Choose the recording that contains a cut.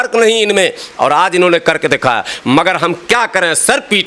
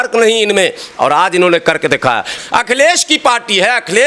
second; 1 cut; at 2.4 s

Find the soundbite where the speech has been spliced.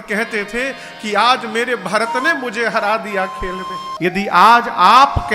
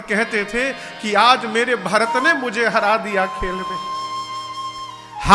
first; 1 cut; at 3.9 s

